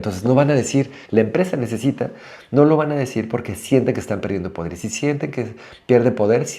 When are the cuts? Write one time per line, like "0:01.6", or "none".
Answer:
0:01.0